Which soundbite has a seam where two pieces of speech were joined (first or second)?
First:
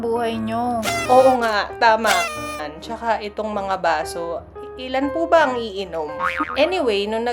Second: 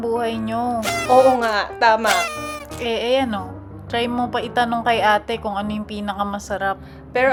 first